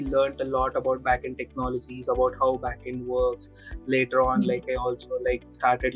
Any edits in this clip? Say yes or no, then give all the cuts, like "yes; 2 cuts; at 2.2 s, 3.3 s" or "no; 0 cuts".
no; 0 cuts